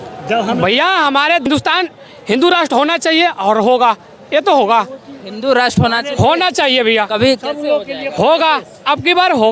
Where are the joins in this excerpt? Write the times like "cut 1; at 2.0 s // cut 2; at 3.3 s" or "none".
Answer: cut 1; at 1.5 s